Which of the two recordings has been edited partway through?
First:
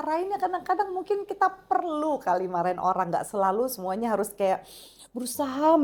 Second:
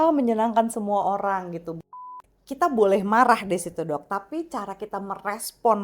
second; 1 cut; at 1.8 s

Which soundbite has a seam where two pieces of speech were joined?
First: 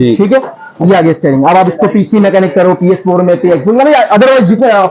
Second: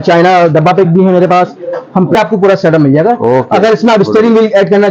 second; 1 cut; at 2.1 s

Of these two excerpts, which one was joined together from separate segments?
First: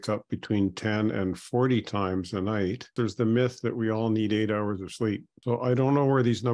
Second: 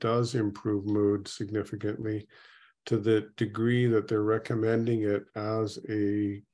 first; 2 cuts; at 2.9 s, 5.3 s

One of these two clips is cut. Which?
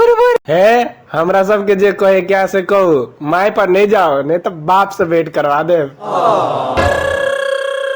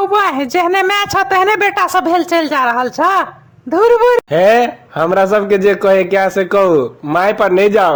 first; 1 cut; at 6.9 s

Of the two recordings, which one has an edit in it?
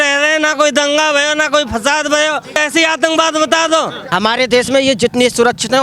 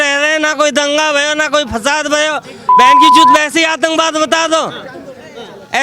first; 2 cuts; at 2.6 s, 4.0 s

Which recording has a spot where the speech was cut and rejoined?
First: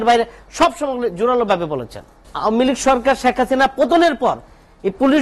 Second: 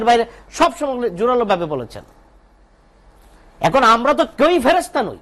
first; 1 cut; at 2.2 s

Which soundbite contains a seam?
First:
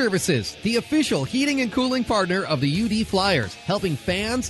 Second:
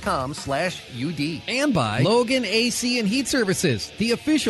second; 1 cut; at 1.8 s

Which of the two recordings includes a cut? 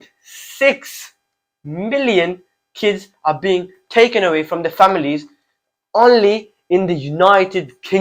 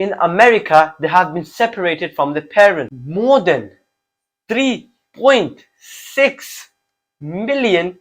second; 1 cut; at 3.0 s

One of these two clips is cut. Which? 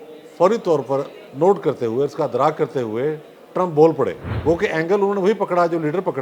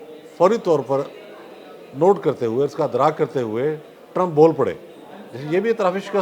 first; 2 cuts; at 1.2 s, 4.3 s

